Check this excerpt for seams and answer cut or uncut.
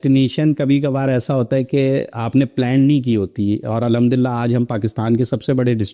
uncut